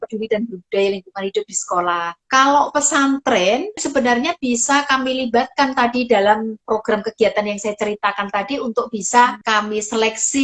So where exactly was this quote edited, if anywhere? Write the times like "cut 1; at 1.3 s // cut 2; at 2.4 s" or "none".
cut 1; at 2.2 s // cut 2; at 3.8 s // cut 3; at 6.6 s // cut 4; at 9.4 s